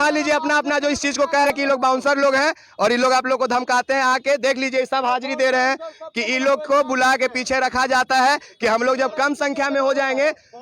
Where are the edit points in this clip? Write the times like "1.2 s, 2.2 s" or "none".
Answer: 1.4 s